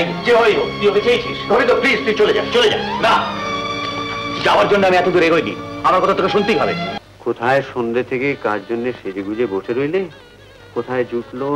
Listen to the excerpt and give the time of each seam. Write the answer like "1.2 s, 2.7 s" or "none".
6.9 s

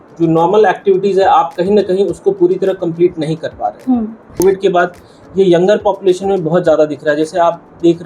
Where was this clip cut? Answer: 4.4 s

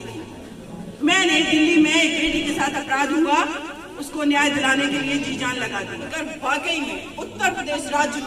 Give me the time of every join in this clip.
6.1 s

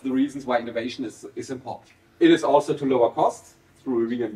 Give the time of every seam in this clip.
2.1 s

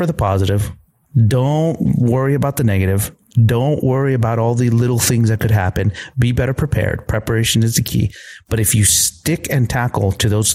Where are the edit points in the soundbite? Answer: none

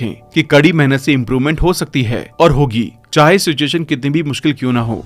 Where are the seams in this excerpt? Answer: none

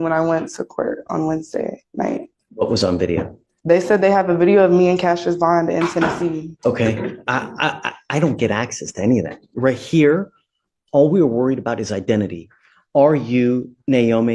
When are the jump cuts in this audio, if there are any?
2.4 s, 6.5 s

